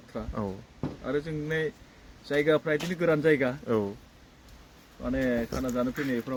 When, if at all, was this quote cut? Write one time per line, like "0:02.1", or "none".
none